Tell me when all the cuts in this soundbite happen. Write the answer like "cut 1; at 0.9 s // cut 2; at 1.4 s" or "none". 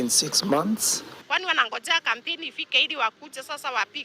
cut 1; at 1.1 s